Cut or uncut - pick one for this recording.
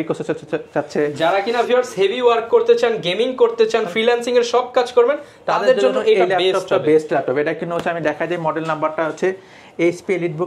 uncut